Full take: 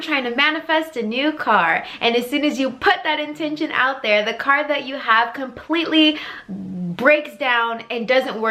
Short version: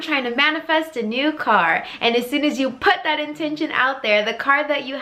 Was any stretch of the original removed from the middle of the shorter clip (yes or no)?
no